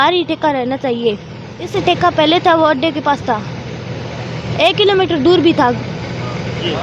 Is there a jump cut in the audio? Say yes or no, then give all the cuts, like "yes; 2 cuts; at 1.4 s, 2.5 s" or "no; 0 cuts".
yes; 1 cut; at 1.7 s